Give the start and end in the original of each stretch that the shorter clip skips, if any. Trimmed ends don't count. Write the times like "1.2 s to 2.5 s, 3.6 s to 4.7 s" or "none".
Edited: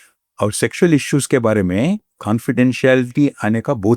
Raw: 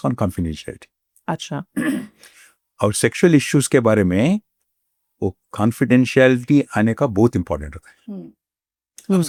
4.5 s to 5.5 s